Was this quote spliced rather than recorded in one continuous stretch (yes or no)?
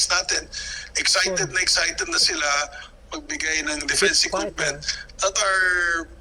no